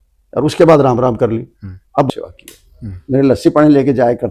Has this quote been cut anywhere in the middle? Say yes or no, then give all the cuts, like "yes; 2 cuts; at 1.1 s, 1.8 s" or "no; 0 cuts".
yes; 1 cut; at 2.1 s